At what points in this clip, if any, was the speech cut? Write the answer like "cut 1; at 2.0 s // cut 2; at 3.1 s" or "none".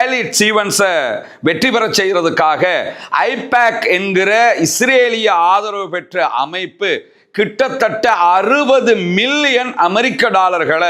none